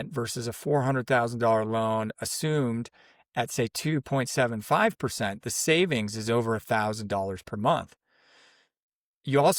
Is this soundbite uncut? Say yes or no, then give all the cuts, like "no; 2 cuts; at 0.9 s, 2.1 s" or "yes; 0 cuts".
yes; 0 cuts